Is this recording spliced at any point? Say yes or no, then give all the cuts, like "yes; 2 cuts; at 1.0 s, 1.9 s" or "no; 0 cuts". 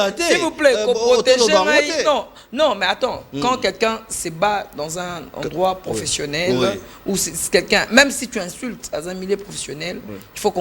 no; 0 cuts